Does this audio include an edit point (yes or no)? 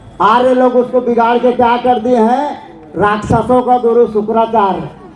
no